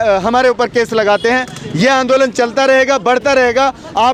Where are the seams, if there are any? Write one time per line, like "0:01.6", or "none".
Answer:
none

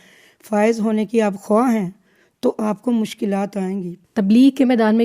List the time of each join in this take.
0:04.0

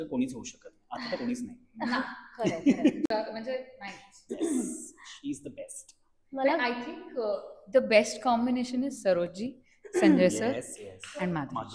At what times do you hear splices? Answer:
none

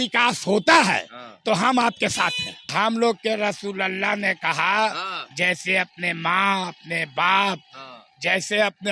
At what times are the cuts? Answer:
0:02.6

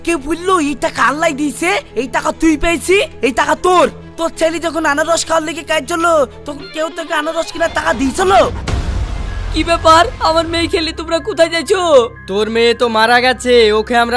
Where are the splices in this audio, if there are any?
0:08.7

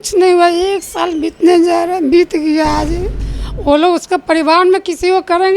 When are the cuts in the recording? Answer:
0:03.2

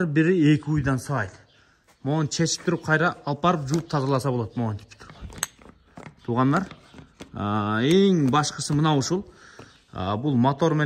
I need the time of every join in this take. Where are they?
none

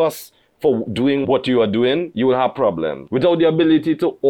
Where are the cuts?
0:01.2
0:02.1
0:03.0

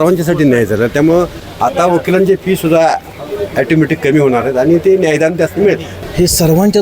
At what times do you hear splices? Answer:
0:05.9

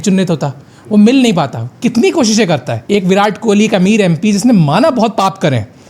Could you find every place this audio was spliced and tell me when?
0:02.7

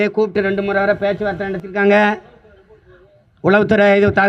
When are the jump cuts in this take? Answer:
none

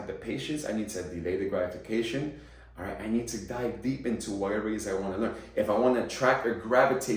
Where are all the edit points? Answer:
none

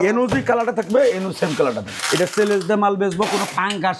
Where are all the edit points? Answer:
0:01.9

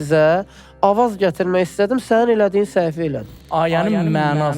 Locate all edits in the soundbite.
0:03.4

